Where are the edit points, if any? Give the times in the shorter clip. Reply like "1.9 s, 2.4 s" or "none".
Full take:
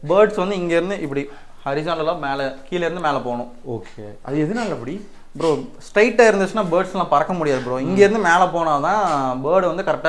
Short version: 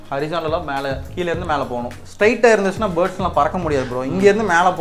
2.0 s